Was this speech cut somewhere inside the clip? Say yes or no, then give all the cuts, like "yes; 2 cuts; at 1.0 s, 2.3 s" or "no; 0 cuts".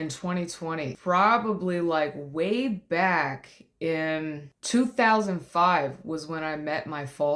yes; 2 cuts; at 0.9 s, 4.5 s